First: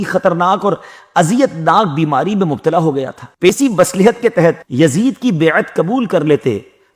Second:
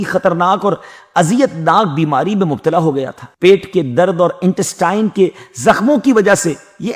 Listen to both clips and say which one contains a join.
first; 1 cut; at 3.5 s

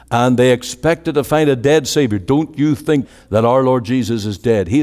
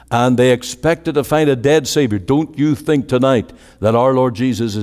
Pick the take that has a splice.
first; 1 cut; at 3.0 s

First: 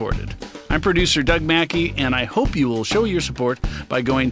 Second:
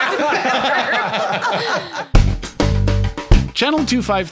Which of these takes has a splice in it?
second; 1 cut; at 2.0 s

